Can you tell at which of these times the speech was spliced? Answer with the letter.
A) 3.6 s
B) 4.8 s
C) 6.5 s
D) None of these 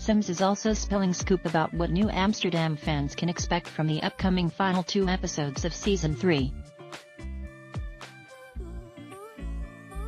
D